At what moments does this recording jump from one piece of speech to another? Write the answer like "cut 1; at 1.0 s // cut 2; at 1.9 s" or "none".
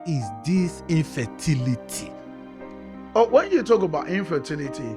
none